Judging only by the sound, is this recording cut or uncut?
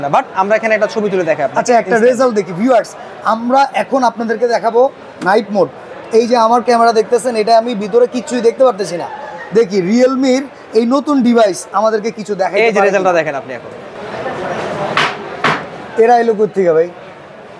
uncut